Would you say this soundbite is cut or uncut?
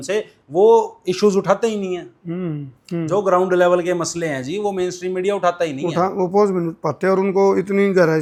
uncut